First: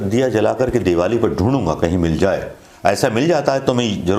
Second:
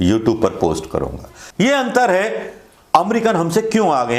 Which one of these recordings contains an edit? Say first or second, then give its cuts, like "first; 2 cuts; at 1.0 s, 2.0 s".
second; 1 cut; at 1.5 s